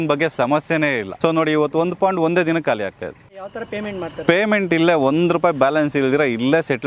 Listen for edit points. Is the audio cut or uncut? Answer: cut